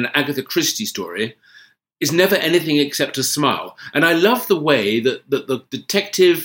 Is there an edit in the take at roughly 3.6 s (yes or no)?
yes